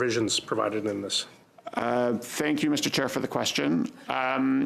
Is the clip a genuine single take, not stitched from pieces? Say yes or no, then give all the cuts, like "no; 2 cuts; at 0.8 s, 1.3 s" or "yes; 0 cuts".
no; 1 cut; at 1.7 s